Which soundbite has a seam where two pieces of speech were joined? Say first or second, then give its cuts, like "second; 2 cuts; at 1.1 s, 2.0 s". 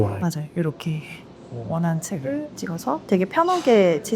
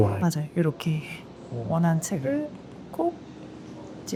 first; 1 cut; at 2.5 s